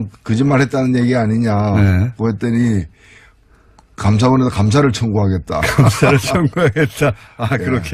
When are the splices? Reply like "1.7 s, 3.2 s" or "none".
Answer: none